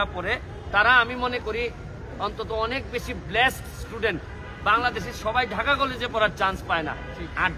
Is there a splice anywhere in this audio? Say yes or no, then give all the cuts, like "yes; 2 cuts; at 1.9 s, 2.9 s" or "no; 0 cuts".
no; 0 cuts